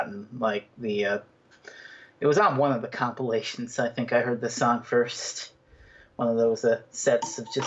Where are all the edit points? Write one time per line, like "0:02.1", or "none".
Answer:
none